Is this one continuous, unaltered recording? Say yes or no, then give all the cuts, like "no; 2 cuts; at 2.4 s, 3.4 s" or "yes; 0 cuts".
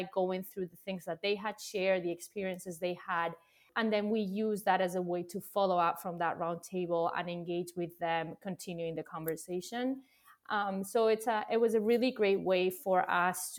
yes; 0 cuts